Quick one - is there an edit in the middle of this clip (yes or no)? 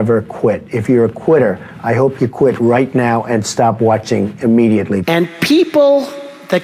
yes